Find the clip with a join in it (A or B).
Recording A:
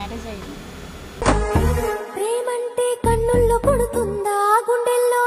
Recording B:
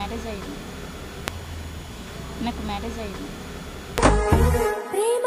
A